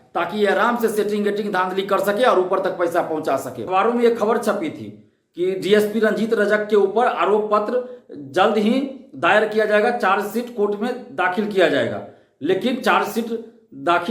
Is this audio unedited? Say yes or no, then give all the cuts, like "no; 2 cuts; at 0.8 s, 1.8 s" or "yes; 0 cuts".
no; 1 cut; at 3.6 s